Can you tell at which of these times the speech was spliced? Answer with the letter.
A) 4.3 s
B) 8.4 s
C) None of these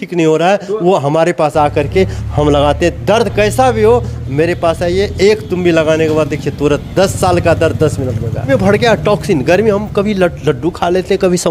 B